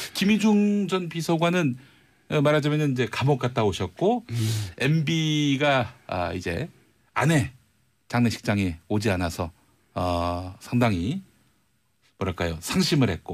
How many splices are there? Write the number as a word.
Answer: one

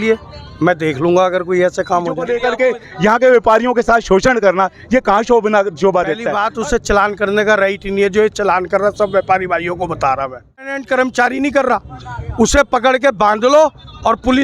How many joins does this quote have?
three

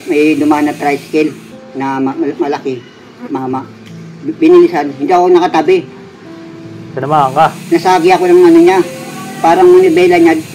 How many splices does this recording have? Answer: zero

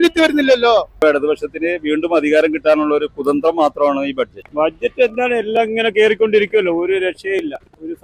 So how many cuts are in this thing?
two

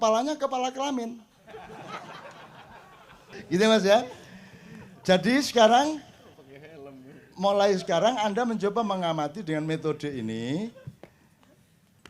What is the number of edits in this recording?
one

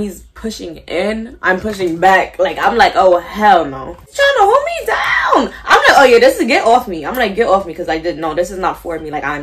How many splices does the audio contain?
one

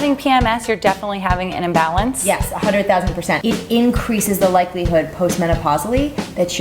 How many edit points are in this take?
one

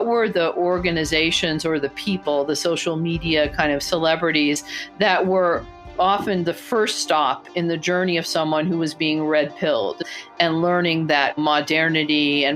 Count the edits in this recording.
one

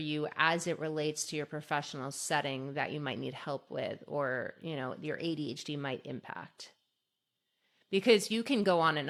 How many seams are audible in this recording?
zero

